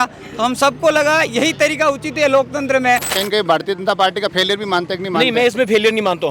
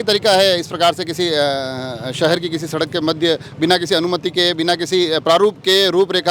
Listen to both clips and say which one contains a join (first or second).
first